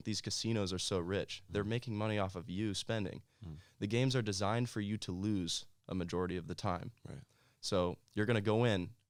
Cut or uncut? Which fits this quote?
uncut